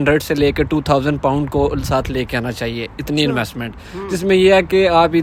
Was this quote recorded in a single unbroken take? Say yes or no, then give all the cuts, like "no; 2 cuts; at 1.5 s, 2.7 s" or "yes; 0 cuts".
yes; 0 cuts